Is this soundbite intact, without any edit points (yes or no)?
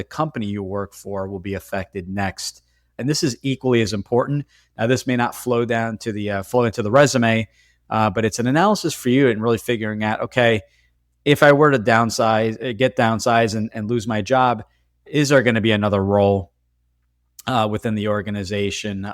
no